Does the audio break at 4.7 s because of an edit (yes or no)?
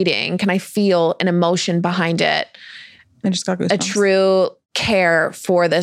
yes